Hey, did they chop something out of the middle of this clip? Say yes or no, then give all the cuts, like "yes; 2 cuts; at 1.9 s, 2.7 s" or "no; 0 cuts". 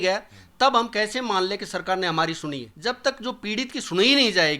yes; 1 cut; at 2.7 s